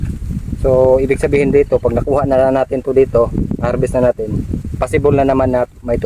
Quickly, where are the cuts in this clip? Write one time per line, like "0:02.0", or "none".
none